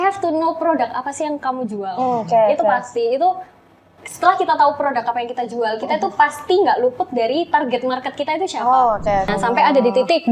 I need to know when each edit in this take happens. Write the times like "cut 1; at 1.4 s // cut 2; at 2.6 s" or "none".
cut 1; at 9.3 s